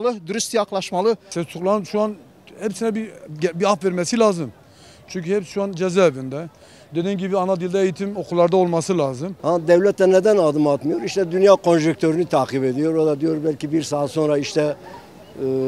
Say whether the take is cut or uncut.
cut